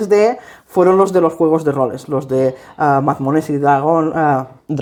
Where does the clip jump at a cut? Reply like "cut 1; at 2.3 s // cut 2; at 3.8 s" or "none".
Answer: none